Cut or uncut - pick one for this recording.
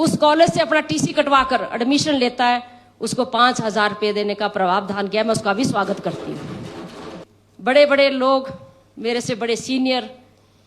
cut